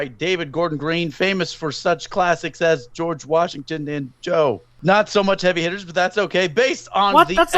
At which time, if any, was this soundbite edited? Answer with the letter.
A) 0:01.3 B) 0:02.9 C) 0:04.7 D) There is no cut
C